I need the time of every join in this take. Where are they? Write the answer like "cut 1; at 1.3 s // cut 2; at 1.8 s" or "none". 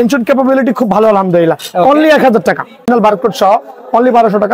cut 1; at 2.8 s